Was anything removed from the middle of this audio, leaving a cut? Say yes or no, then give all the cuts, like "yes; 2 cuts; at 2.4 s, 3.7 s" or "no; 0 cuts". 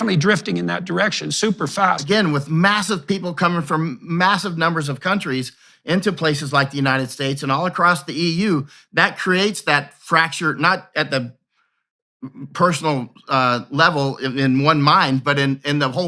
yes; 1 cut; at 2.0 s